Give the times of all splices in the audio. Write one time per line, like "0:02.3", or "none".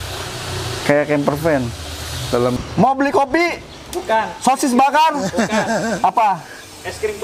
0:02.6